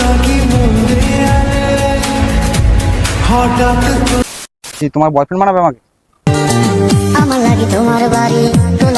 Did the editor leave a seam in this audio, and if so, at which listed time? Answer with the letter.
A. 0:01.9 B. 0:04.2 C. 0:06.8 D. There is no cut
B